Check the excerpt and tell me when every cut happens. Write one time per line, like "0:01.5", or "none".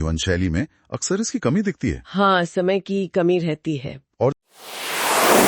0:04.4